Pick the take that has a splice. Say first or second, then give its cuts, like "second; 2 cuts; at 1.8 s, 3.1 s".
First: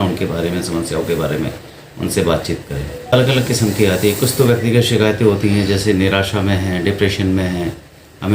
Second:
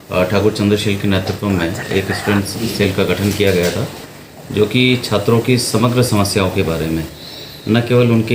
first; 1 cut; at 3.1 s